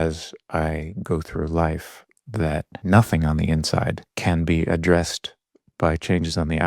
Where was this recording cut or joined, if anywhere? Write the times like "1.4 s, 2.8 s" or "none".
2.7 s, 4.1 s